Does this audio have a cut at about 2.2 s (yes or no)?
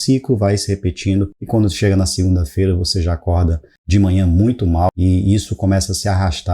no